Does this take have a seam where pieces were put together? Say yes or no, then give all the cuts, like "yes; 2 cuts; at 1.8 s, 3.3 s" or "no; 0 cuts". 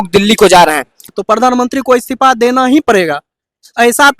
yes; 1 cut; at 1.2 s